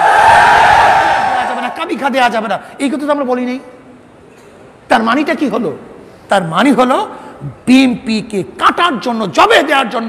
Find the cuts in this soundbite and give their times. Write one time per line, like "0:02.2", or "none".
0:01.5